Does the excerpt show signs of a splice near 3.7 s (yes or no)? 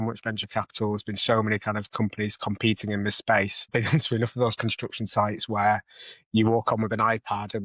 yes